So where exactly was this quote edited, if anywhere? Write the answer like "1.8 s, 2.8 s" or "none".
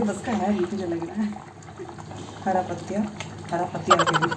1.3 s